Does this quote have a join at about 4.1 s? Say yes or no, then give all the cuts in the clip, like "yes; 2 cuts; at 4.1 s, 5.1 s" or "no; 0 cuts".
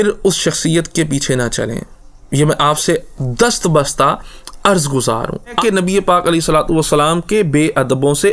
no; 1 cut; at 5.6 s